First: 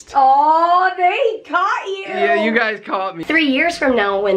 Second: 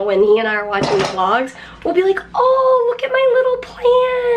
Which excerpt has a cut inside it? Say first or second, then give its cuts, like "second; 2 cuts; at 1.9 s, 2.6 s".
first; 1 cut; at 3.2 s